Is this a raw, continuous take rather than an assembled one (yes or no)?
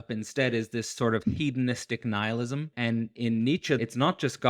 no